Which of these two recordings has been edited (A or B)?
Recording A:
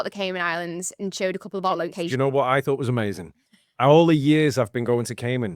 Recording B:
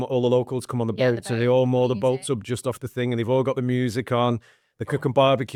A